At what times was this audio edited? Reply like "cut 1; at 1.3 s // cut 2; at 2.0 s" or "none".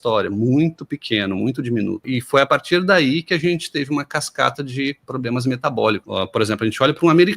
cut 1; at 2.0 s // cut 2; at 6.0 s